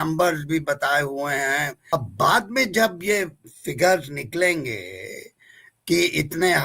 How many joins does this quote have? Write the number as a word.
one